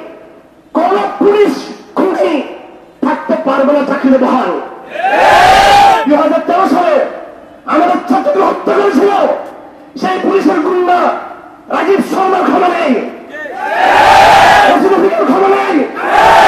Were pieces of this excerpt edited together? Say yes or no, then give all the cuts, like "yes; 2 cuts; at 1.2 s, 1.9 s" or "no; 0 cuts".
yes; 1 cut; at 6.0 s